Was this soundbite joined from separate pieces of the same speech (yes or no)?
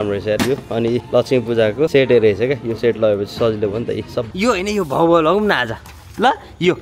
yes